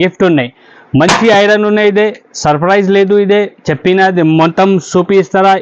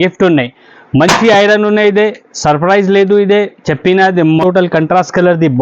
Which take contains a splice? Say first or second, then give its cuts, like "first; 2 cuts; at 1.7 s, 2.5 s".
second; 1 cut; at 4.4 s